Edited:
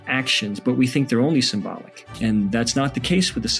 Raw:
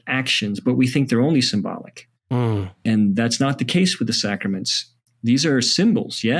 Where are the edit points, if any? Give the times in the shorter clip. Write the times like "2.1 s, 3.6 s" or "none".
2.0 s